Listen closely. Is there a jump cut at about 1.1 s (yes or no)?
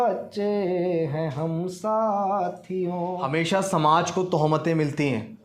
no